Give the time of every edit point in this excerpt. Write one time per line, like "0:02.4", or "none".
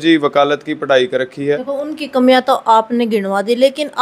0:01.7